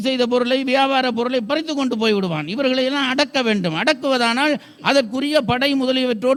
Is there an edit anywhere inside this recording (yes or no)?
no